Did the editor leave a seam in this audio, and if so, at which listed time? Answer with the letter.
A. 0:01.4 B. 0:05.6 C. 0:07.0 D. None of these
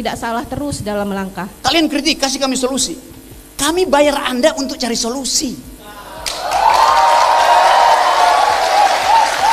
A